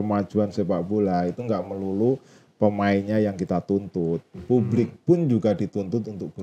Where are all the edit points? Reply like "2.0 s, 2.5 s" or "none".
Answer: none